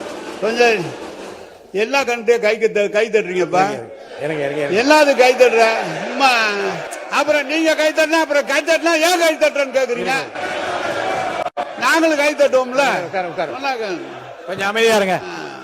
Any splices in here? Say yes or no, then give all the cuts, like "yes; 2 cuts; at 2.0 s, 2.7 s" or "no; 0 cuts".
no; 0 cuts